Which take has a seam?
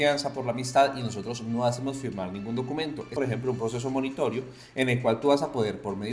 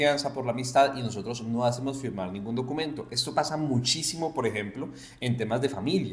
first; 1 cut; at 3.1 s

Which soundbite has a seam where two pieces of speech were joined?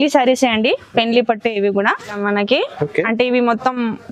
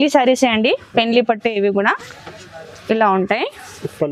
first; 1 cut; at 2.2 s

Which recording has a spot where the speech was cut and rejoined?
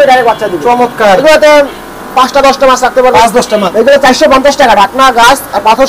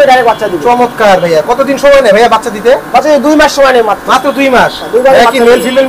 first; 2 cuts; at 1.2 s, 3.7 s

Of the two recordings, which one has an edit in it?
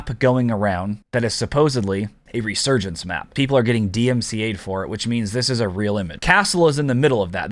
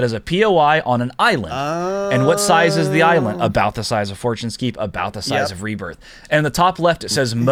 first; 4 cuts; at 1.0 s, 2.2 s, 3.3 s, 6.1 s

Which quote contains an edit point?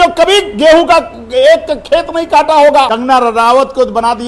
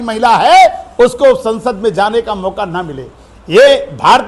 first; 1 cut; at 2.9 s

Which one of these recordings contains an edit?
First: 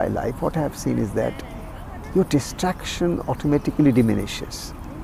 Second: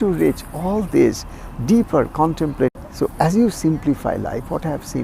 second; 1 cut; at 2.7 s

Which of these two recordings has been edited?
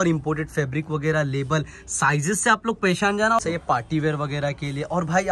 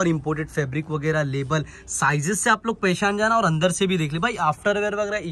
first; 1 cut; at 3.4 s

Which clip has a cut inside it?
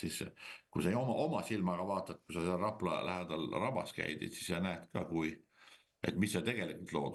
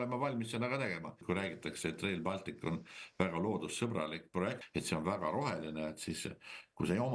second; 2 cuts; at 1.2 s, 4.6 s

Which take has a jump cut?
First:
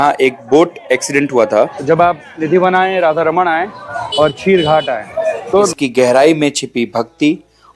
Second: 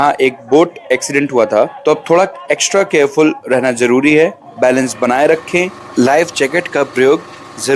first; 2 cuts; at 1.8 s, 5.7 s

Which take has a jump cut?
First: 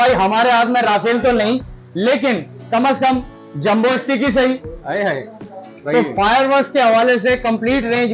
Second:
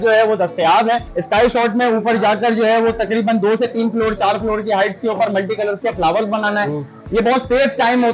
second; 1 cut; at 1.1 s

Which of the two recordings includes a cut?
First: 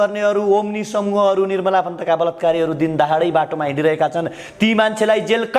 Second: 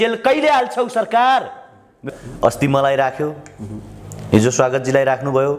second; 1 cut; at 2.0 s

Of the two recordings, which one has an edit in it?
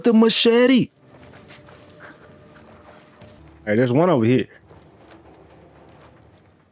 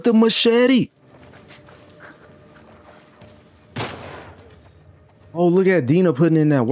first; 1 cut; at 3.4 s

